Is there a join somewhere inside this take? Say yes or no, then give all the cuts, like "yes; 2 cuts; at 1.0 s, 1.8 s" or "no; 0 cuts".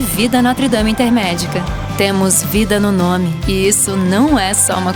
no; 0 cuts